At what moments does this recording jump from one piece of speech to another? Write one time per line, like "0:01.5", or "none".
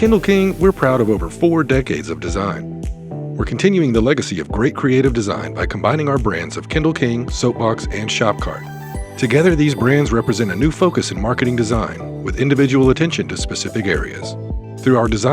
none